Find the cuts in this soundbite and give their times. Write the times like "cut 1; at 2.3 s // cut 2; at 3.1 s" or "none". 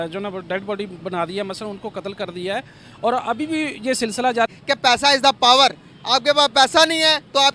cut 1; at 4.5 s